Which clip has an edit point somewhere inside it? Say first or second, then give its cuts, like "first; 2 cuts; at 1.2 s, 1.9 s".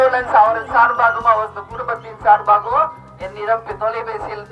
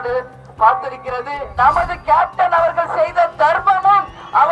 second; 1 cut; at 1.5 s